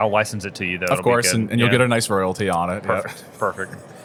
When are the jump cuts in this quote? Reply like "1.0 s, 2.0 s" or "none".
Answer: none

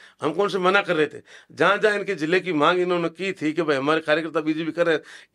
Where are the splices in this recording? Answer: none

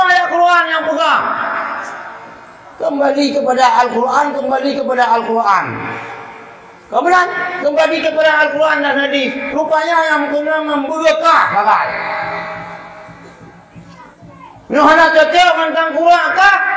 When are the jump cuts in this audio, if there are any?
none

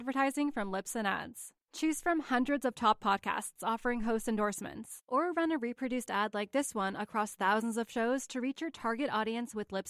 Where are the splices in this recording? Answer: none

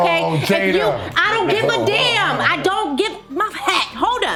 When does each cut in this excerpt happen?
none

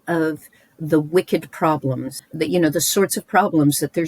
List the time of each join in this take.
2.1 s

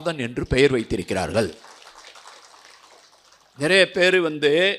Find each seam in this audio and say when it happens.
none

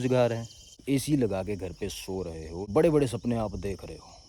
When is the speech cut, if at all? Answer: 0.8 s, 2.7 s

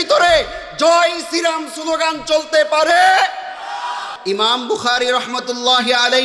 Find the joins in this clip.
4.1 s

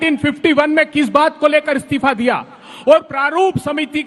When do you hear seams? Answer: 2.6 s

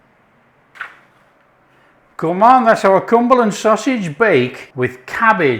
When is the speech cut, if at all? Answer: 0.7 s, 4.6 s

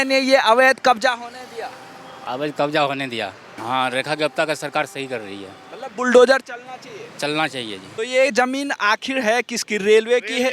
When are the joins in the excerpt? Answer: 3.5 s, 7.8 s

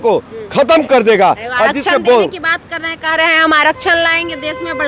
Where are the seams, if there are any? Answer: none

